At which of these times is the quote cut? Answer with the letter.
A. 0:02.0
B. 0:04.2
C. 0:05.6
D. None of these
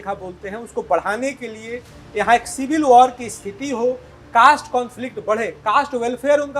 D